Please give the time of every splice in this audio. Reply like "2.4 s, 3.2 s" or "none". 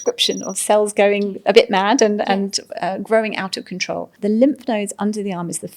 4.1 s